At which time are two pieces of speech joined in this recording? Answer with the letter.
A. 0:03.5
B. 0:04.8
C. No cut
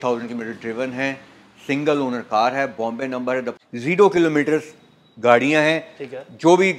A